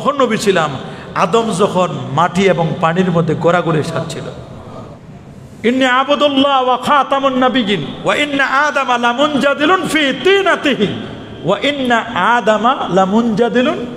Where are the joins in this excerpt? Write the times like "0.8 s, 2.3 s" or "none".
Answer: 5.0 s